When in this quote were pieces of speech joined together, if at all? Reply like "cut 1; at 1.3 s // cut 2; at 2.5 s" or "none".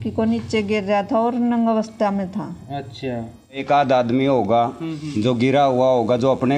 cut 1; at 3.6 s